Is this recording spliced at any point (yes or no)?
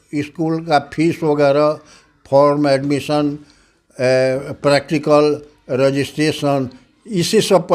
no